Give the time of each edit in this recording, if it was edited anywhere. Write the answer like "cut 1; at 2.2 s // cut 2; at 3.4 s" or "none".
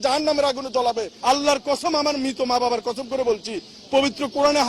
cut 1; at 1.1 s